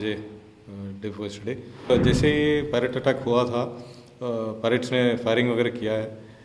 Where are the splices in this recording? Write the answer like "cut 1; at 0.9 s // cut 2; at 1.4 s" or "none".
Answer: cut 1; at 1.9 s